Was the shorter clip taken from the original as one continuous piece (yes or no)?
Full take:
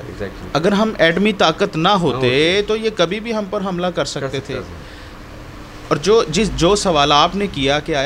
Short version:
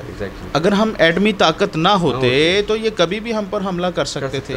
yes